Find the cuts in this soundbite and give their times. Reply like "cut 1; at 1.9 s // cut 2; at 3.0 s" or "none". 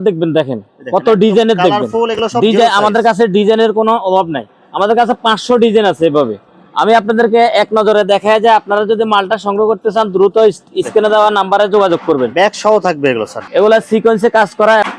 none